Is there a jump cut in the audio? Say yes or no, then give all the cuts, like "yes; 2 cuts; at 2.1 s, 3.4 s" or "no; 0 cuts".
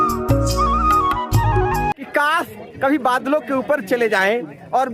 yes; 1 cut; at 1.9 s